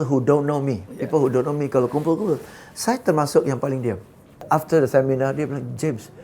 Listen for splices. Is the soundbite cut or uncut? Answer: cut